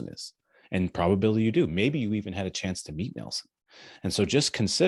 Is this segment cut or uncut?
uncut